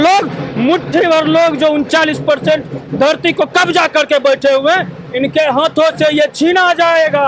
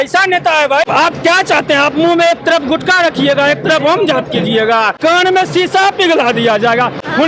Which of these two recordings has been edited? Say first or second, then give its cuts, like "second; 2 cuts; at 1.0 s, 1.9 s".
second; 2 cuts; at 0.9 s, 4.9 s